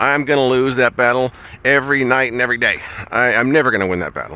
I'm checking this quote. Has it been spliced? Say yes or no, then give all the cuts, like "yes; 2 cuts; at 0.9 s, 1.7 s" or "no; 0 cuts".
no; 0 cuts